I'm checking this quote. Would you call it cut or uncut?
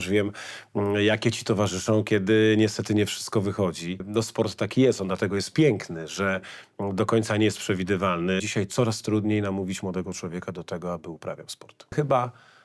cut